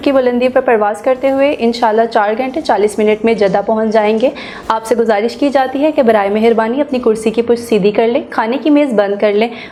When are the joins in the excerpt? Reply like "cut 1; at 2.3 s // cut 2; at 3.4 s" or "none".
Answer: none